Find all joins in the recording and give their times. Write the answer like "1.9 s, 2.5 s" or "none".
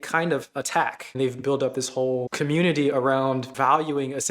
1.0 s, 2.3 s, 3.5 s

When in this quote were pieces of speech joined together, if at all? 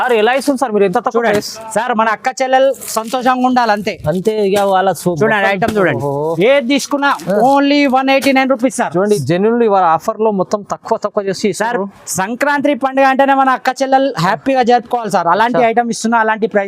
9.2 s

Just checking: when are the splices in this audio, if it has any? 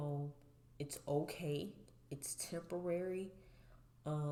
none

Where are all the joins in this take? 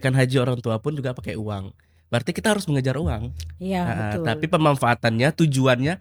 none

